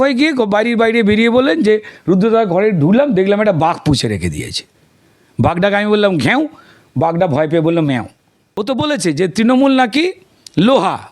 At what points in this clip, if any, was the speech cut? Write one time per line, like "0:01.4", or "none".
0:08.5